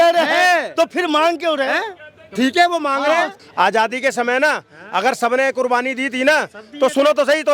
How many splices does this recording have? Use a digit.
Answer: 1